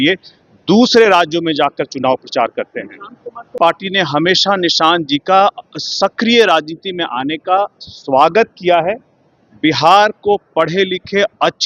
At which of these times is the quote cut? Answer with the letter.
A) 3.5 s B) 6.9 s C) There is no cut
A